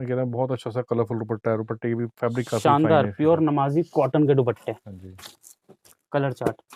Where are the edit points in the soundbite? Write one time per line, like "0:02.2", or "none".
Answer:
none

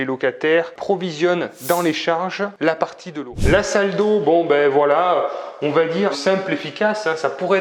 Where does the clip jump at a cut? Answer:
0:03.3

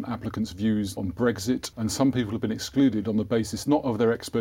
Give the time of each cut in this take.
0:01.0
0:01.7

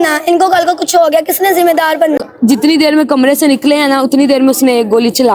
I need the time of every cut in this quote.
0:02.2

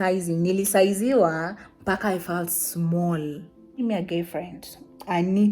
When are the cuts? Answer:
0:03.8

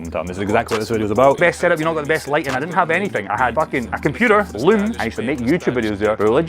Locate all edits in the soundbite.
0:01.4
0:05.0

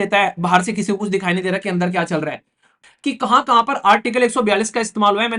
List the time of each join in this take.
0:02.8

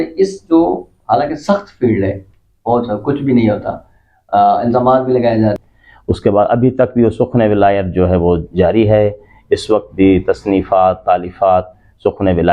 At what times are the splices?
0:05.6

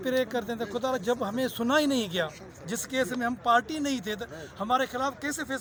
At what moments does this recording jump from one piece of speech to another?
none

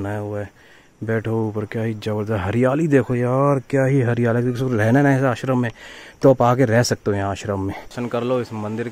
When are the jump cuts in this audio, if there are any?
0:07.9

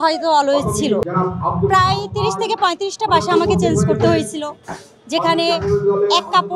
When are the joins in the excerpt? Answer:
0:01.1

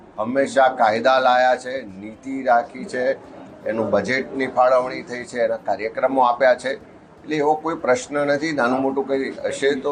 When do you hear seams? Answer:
none

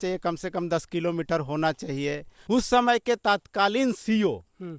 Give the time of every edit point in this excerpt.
0:02.3

